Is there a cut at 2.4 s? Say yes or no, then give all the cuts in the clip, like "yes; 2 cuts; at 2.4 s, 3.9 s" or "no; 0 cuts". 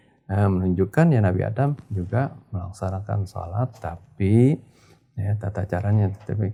no; 0 cuts